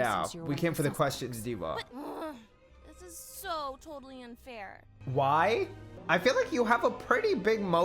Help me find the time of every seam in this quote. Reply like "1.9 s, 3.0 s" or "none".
1.9 s, 4.9 s, 5.9 s

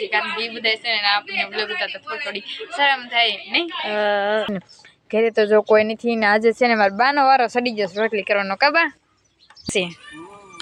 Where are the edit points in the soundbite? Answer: 4.7 s, 9.7 s

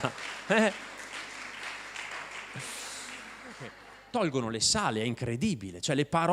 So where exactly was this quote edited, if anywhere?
3.9 s

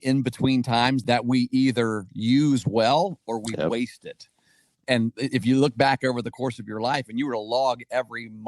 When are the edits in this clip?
1.0 s, 4.8 s

